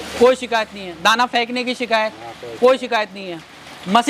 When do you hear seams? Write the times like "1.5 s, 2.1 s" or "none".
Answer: none